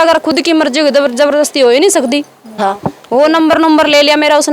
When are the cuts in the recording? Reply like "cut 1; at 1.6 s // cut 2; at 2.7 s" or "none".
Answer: cut 1; at 2.6 s